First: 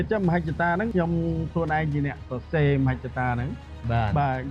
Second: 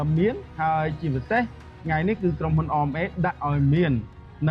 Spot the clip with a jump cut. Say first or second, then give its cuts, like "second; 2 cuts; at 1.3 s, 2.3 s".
first; 1 cut; at 0.9 s